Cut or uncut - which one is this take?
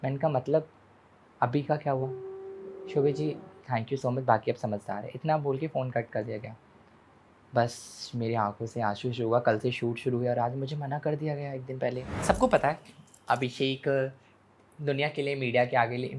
cut